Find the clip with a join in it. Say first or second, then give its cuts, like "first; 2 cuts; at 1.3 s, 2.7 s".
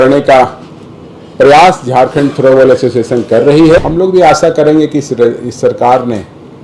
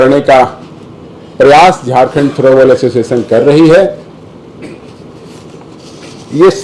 first; 1 cut; at 3.8 s